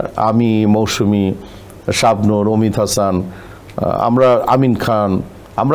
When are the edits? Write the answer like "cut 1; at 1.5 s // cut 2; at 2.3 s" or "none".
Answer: none